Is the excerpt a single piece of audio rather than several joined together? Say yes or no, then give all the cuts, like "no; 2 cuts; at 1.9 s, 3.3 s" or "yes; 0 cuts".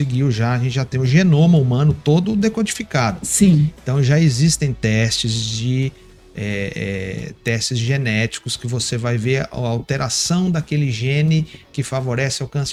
yes; 0 cuts